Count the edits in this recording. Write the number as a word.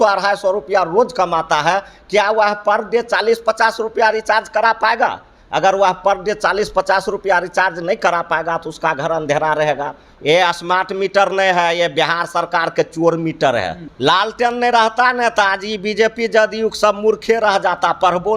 two